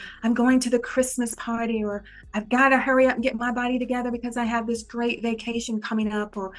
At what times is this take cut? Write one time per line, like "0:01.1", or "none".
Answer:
none